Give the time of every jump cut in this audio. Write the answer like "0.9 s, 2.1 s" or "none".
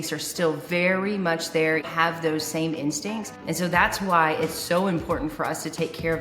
1.8 s, 3.3 s